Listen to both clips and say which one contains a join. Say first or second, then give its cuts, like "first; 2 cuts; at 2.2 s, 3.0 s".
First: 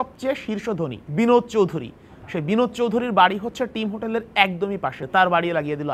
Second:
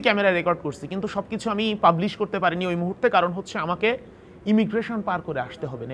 first; 2 cuts; at 1.0 s, 5.0 s